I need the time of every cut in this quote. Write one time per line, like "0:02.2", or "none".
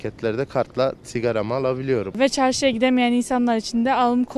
0:02.2